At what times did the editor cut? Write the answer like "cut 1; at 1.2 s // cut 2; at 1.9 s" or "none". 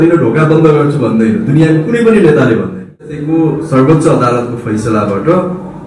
cut 1; at 3.2 s